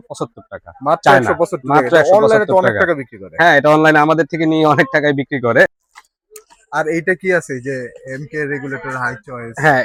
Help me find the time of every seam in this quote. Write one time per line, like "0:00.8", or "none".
none